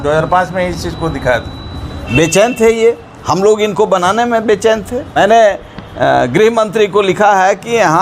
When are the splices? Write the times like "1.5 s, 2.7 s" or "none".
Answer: 5.1 s

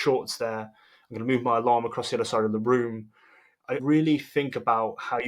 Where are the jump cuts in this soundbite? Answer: 3.8 s

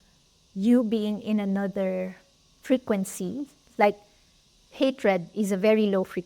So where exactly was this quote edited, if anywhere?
none

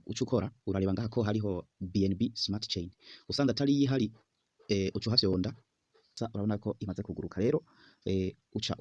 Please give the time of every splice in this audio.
6.1 s

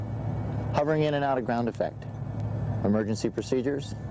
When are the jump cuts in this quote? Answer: 1.1 s

